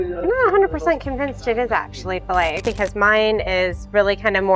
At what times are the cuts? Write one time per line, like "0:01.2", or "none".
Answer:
0:02.7

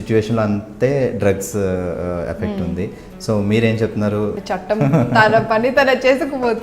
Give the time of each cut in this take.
0:04.4

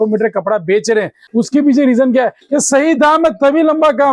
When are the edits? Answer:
0:01.2

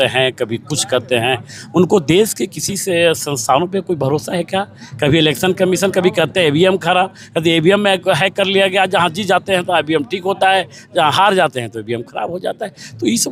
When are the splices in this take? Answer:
none

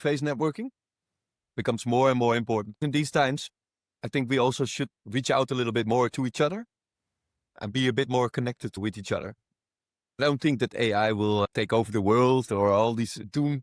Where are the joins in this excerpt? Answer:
0:02.8
0:08.8

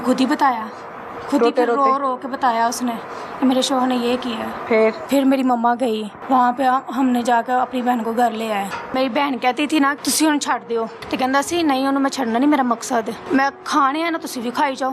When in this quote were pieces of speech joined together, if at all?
0:05.0
0:06.1
0:08.9
0:10.0
0:11.0
0:13.2

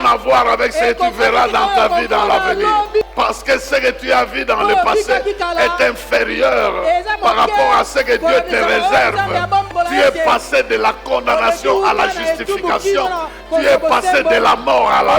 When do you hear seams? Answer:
0:03.1
0:09.7

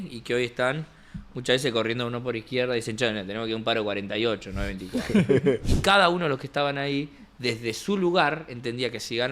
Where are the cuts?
0:05.7

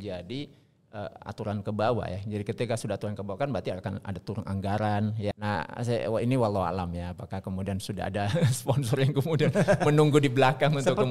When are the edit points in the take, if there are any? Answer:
0:05.4

